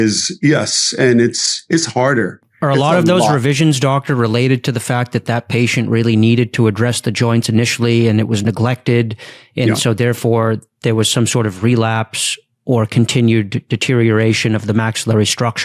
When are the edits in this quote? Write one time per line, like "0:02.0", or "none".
none

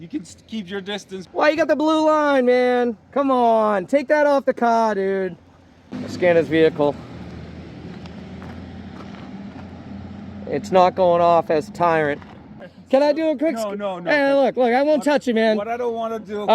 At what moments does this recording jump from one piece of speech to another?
0:01.1
0:05.8
0:12.7

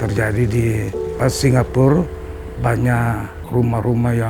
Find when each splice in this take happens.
0:01.1
0:03.4

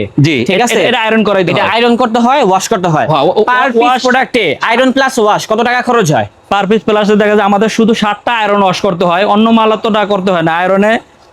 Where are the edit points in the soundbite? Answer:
none

